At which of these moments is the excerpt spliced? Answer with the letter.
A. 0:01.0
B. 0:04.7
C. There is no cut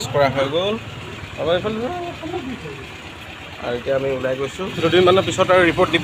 B